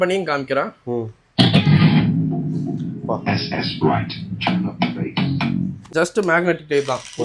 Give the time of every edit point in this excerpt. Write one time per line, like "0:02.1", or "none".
0:05.8